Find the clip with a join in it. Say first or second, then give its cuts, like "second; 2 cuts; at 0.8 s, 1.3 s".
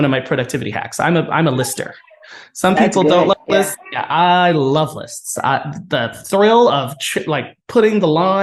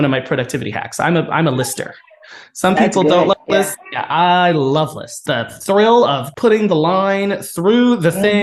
second; 2 cuts; at 5.1 s, 6.3 s